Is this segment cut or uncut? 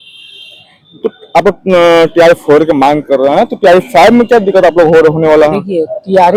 uncut